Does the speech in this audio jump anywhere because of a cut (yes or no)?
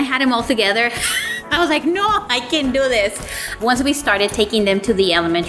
no